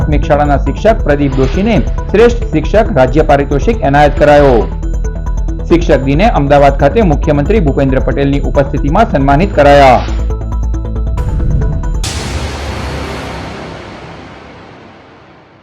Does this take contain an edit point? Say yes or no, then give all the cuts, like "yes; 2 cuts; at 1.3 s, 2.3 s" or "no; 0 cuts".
yes; 1 cut; at 12.0 s